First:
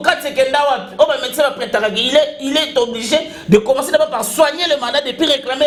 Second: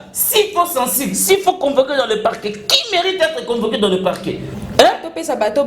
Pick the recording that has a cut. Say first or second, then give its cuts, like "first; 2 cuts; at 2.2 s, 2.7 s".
second; 1 cut; at 4.5 s